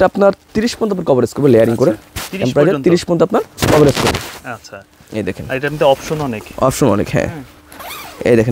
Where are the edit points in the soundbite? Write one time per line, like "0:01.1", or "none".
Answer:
none